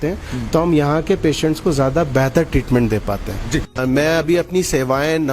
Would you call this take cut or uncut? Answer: cut